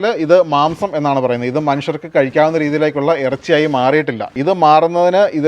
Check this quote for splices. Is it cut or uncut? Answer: cut